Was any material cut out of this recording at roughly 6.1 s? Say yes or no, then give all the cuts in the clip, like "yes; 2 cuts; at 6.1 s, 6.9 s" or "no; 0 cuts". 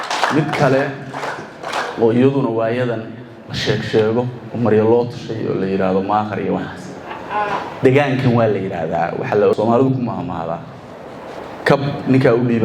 no; 1 cut; at 9.5 s